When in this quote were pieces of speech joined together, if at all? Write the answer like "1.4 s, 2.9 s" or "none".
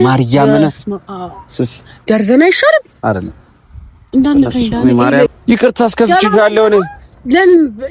5.3 s